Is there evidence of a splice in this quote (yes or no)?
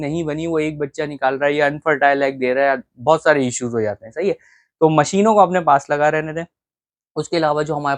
no